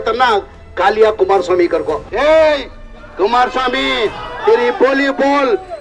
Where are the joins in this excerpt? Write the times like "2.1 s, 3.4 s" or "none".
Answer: 2.1 s